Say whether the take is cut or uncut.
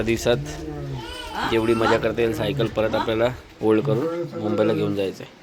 uncut